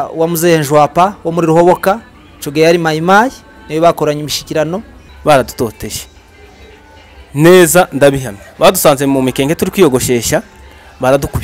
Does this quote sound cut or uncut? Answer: cut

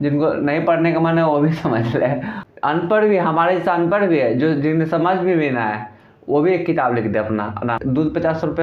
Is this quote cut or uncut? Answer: cut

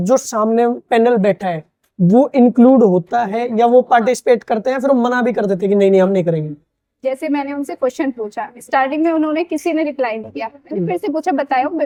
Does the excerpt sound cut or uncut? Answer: uncut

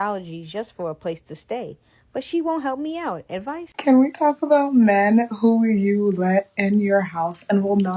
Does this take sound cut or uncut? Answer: cut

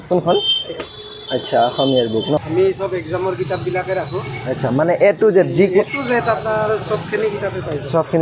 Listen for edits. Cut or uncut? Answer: cut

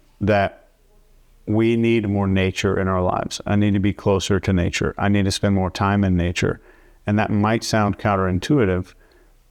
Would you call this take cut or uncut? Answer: uncut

